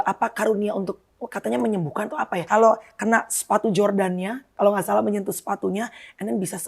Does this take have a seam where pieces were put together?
yes; 1 cut; at 2.4 s

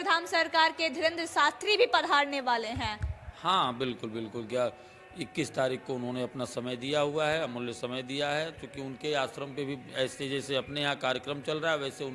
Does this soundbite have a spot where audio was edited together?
no; 0 cuts

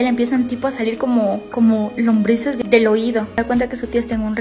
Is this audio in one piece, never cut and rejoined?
no; 2 cuts; at 2.6 s, 3.3 s

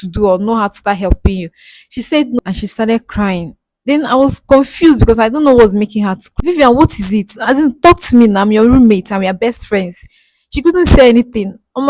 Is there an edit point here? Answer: yes; 1 cut; at 6.3 s

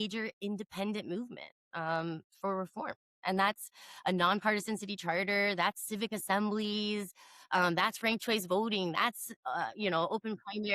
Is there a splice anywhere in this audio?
no; 0 cuts

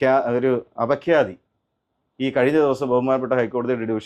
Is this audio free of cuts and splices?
yes; 0 cuts

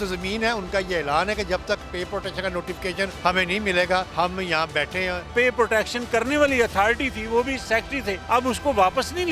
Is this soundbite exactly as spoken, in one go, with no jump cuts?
no; 4 cuts; at 3.1 s, 4.1 s, 5.3 s, 7.8 s

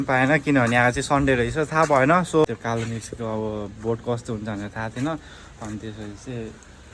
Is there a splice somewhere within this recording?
yes; 1 cut; at 2.5 s

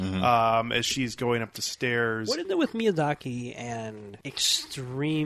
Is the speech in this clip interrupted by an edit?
yes; 1 cut; at 4.1 s

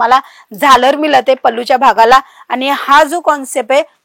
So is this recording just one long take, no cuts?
yes; 0 cuts

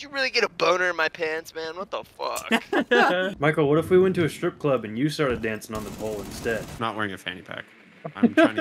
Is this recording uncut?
no; 2 cuts; at 3.3 s, 6.7 s

